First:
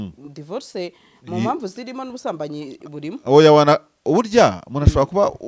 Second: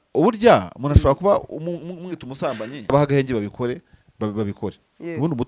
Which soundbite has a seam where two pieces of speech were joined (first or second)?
second